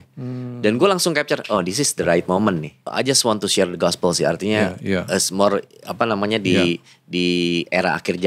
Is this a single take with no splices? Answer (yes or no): no